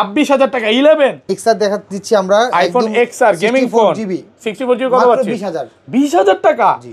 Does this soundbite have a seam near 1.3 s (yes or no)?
yes